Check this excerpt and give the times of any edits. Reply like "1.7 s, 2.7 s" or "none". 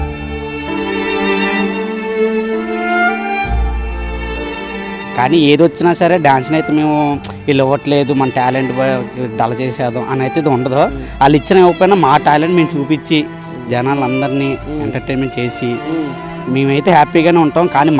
none